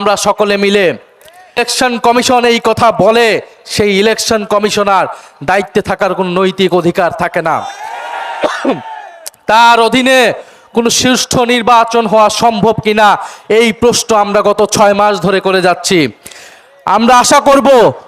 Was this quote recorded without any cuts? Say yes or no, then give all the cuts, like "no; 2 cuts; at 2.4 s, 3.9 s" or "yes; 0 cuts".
no; 1 cut; at 1.6 s